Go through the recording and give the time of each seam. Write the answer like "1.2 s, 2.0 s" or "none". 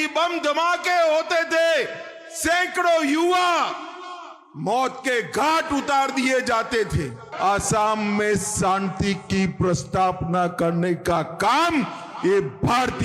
7.2 s